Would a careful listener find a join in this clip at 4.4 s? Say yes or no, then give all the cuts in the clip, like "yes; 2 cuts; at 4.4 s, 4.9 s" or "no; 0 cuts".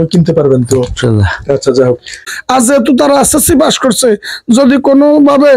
no; 1 cut; at 2.2 s